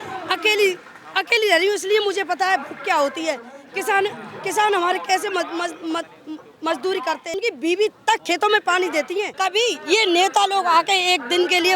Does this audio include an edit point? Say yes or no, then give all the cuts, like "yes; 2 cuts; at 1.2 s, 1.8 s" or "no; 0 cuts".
yes; 2 cuts; at 7.3 s, 9.3 s